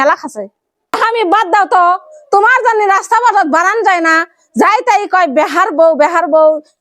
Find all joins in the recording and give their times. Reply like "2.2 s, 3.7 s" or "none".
1.0 s